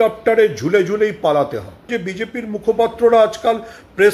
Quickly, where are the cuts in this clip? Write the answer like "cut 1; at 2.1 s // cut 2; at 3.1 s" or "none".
cut 1; at 2.0 s